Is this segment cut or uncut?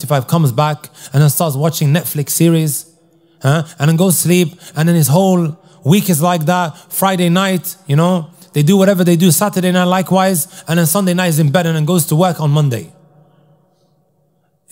uncut